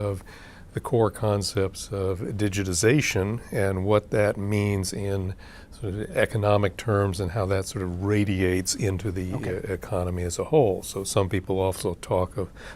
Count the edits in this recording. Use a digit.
0